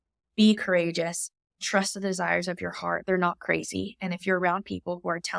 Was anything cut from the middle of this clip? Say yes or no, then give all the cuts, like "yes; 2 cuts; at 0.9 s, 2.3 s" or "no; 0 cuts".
yes; 1 cut; at 1.6 s